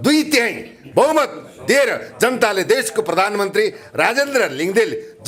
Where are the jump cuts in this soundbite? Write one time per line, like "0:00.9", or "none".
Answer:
none

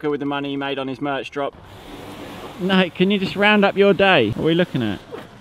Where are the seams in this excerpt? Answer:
0:01.6
0:04.3

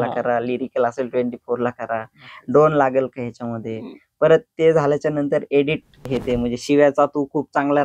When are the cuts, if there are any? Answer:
0:06.1

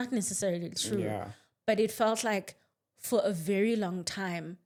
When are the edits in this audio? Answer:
none

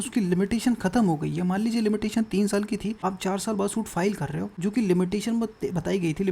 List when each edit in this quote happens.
0:03.0
0:04.5

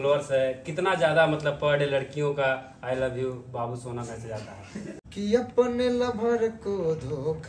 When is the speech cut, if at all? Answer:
0:05.0

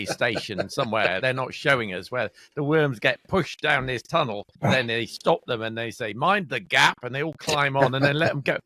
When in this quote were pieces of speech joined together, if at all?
0:01.2
0:04.5

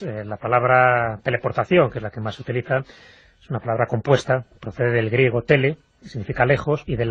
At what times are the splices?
none

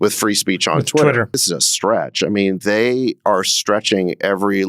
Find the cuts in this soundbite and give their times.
0:01.3

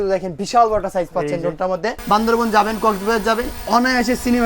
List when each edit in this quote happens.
0:02.0

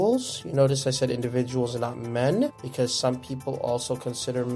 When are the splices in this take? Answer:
0:02.6

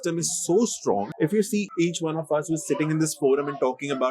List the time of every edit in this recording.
0:01.1

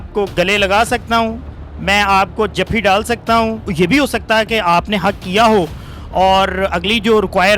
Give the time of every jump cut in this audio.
0:03.6

